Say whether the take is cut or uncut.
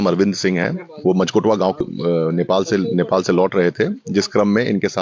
cut